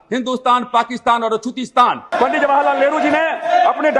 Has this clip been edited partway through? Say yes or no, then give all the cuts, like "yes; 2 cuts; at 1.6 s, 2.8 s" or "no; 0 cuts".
yes; 1 cut; at 2.1 s